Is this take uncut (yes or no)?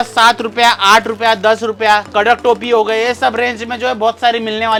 yes